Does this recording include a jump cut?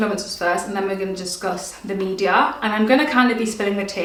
no; 0 cuts

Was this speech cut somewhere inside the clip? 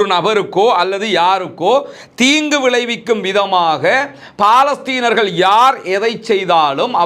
no; 0 cuts

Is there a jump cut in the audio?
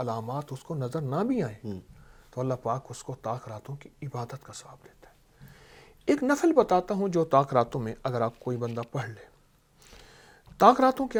no; 0 cuts

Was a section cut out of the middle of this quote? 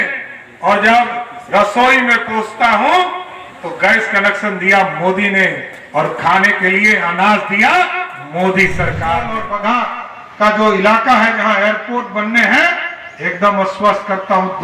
yes; 1 cut; at 9.4 s

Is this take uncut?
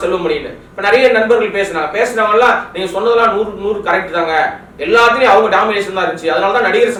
yes; 0 cuts

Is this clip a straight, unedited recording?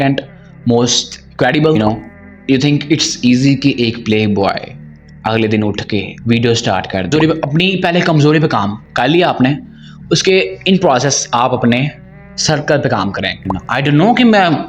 no; 3 cuts; at 1.8 s, 7.1 s, 13.5 s

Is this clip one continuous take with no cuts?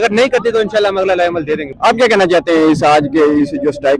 yes; 0 cuts

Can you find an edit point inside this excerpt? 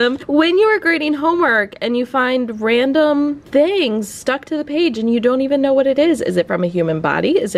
no; 0 cuts

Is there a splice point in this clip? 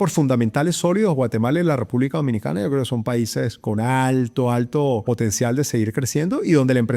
yes; 1 cut; at 5.0 s

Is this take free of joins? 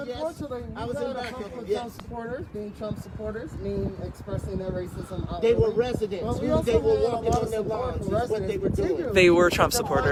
yes; 0 cuts

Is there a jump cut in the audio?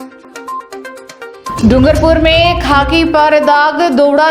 no; 0 cuts

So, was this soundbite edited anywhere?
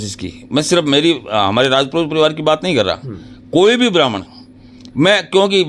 no; 0 cuts

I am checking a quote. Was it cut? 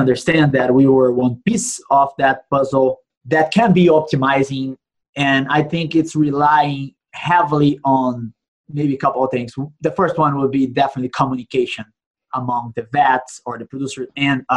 yes; 1 cut; at 3.1 s

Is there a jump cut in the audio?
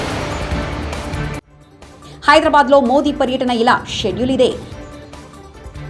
no; 0 cuts

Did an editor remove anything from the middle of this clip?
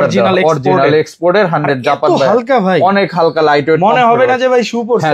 no; 0 cuts

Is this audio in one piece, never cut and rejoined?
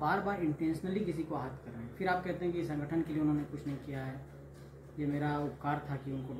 yes; 0 cuts

